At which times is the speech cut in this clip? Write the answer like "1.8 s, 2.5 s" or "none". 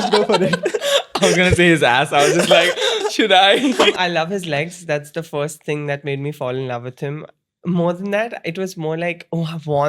3.9 s